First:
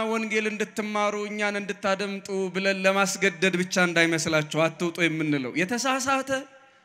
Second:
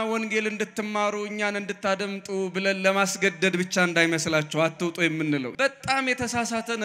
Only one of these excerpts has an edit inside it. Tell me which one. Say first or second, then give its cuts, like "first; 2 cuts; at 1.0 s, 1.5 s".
second; 1 cut; at 5.5 s